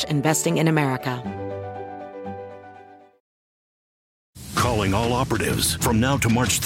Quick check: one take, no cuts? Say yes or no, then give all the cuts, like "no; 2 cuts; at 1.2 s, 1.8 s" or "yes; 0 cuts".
no; 1 cut; at 1.2 s